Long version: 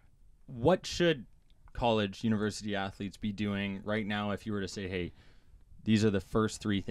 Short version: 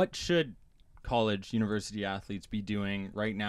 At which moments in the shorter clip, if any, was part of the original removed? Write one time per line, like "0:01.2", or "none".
none